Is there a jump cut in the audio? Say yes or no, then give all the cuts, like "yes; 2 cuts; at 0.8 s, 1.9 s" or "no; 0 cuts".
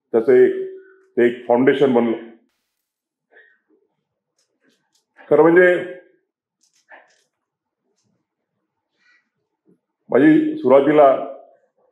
no; 0 cuts